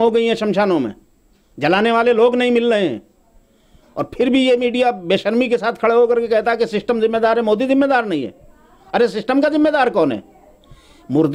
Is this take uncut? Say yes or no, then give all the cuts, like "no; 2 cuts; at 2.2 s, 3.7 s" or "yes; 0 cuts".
yes; 0 cuts